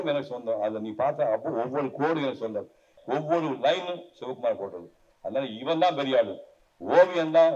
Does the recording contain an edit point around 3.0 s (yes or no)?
yes